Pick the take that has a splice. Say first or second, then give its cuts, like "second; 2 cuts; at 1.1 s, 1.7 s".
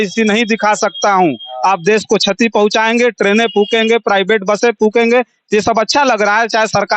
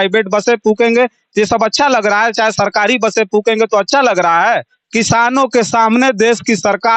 second; 1 cut; at 4.8 s